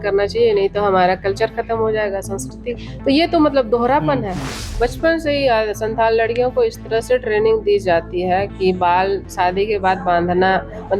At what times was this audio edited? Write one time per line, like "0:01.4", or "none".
0:04.6

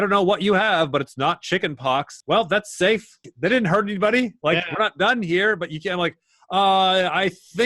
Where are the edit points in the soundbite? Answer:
0:02.1
0:03.3

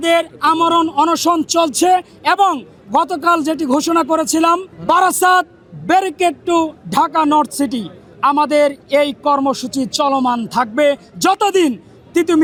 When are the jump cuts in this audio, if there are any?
none

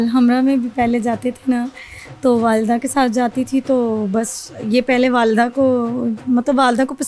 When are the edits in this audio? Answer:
none

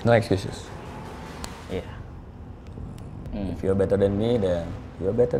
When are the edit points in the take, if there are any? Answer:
0:01.6
0:03.2

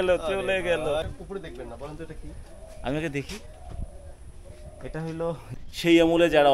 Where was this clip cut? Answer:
0:01.2
0:05.5

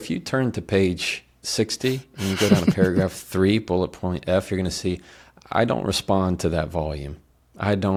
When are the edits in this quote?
none

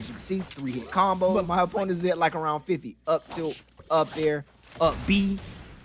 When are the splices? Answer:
0:01.4

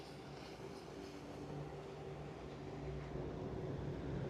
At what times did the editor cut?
none

